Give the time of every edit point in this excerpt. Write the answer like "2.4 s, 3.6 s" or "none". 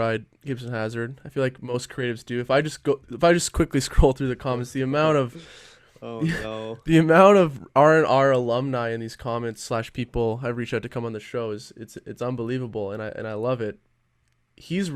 none

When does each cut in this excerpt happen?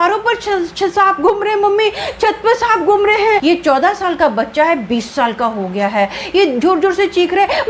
3.4 s

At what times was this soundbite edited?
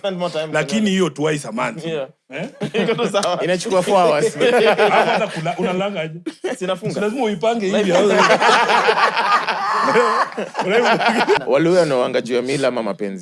11.4 s

